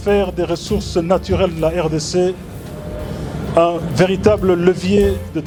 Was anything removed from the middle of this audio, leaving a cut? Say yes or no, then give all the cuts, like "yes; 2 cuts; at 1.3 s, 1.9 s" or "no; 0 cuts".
no; 0 cuts